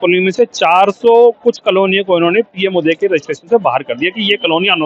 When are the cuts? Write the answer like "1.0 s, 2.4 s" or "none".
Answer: none